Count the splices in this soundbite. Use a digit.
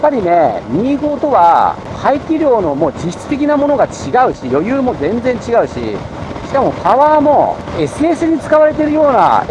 2